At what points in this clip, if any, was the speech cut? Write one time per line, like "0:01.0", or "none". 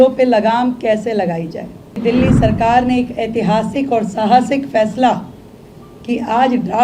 0:02.0